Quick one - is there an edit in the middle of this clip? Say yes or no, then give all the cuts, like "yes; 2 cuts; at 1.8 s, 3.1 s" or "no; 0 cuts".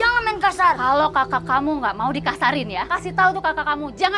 yes; 1 cut; at 2.9 s